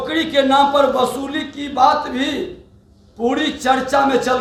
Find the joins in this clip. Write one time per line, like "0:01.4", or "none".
none